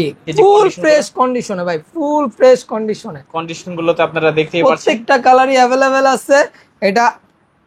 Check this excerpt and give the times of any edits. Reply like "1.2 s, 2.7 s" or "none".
none